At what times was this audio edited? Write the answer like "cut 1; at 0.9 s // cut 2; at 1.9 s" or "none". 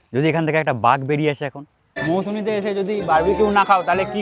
cut 1; at 2.0 s

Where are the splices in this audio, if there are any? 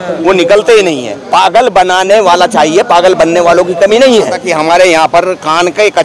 cut 1; at 1.1 s // cut 2; at 4.5 s

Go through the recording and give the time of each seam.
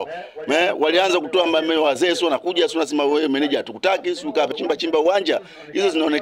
cut 1; at 4.5 s

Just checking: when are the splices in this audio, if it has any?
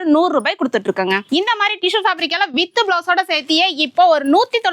cut 1; at 1.2 s

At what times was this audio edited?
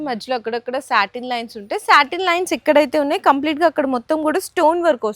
none

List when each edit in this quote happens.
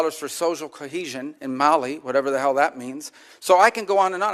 none

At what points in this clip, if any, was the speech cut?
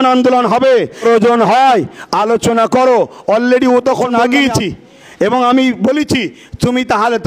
cut 1; at 4.1 s

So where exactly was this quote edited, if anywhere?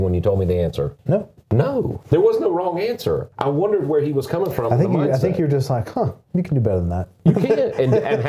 cut 1; at 1.0 s // cut 2; at 2.0 s // cut 3; at 3.3 s // cut 4; at 7.1 s

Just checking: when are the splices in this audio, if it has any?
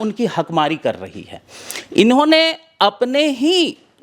none

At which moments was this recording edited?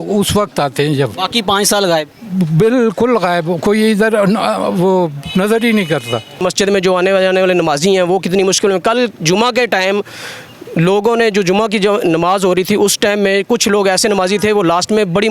cut 1; at 6.4 s

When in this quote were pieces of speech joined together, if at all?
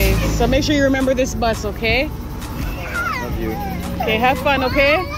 cut 1; at 3.0 s

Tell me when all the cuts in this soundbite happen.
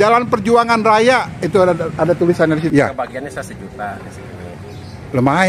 cut 1; at 2.7 s

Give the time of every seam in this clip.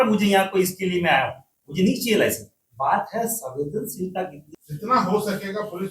cut 1; at 4.4 s

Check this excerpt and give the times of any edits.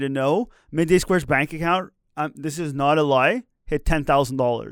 none

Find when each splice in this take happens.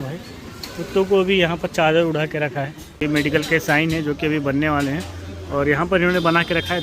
cut 1; at 3.0 s

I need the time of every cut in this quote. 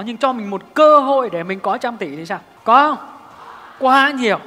cut 1; at 2.5 s

